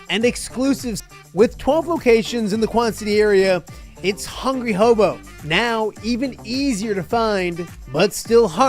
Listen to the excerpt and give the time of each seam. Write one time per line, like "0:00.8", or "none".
0:01.0